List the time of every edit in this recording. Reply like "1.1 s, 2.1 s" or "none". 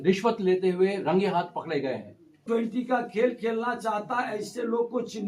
2.4 s